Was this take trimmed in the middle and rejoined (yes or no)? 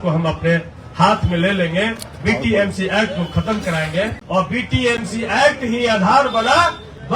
yes